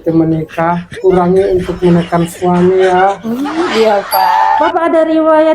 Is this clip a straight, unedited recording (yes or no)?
no